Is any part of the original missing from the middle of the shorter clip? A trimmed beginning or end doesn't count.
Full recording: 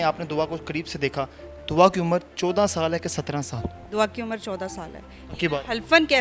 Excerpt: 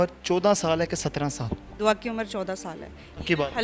no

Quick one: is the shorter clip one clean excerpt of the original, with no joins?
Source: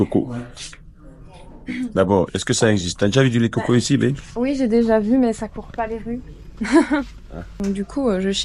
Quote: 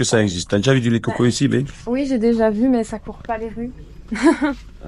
yes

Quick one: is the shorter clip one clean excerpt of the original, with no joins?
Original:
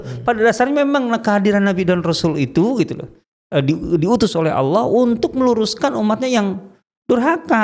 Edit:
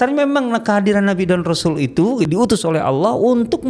no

